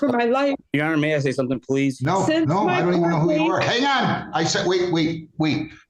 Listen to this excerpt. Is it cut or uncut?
cut